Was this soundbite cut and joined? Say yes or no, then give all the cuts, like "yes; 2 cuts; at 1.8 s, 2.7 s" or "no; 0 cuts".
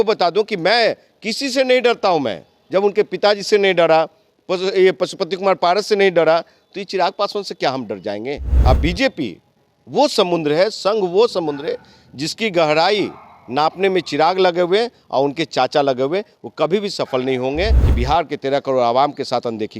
yes; 2 cuts; at 8.5 s, 17.8 s